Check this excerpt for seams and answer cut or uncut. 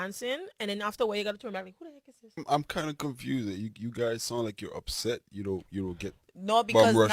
cut